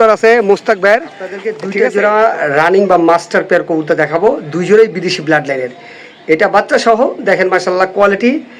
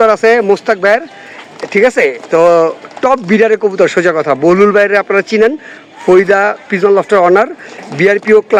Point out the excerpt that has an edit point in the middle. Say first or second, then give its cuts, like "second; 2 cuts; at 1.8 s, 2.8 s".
first; 1 cut; at 1.6 s